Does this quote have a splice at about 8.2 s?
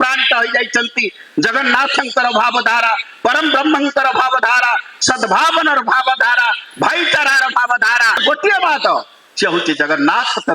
yes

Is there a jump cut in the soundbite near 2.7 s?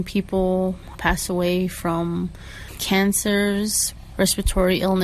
yes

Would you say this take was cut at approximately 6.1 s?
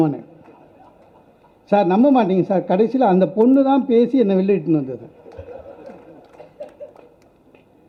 no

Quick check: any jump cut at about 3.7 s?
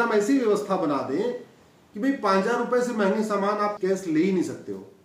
yes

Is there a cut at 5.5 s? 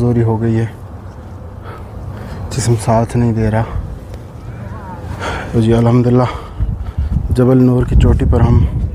yes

